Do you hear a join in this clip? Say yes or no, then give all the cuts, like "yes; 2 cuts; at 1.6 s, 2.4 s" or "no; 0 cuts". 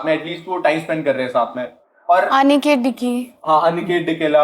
no; 0 cuts